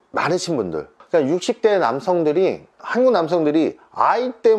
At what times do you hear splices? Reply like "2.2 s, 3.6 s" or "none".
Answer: 2.7 s